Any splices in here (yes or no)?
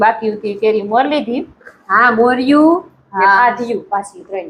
no